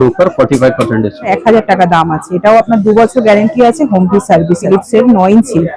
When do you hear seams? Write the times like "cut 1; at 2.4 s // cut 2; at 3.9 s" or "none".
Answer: cut 1; at 1.4 s // cut 2; at 4.6 s